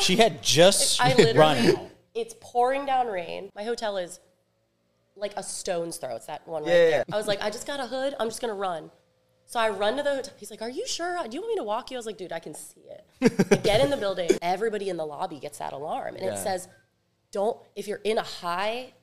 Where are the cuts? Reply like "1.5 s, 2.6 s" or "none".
3.5 s, 7.1 s, 14.4 s